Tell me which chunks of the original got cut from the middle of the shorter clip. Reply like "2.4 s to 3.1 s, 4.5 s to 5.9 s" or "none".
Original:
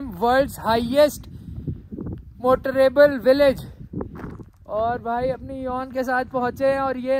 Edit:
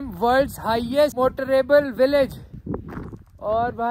1.1 s to 2.4 s